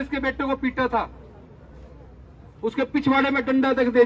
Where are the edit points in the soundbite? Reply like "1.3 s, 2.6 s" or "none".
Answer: none